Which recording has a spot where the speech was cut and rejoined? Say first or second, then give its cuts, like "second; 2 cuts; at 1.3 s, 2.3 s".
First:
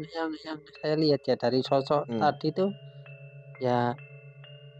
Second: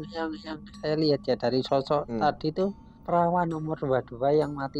second; 1 cut; at 2.9 s